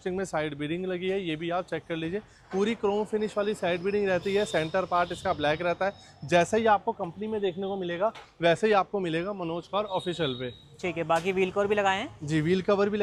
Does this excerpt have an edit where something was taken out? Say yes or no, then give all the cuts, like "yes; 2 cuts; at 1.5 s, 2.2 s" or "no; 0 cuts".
no; 0 cuts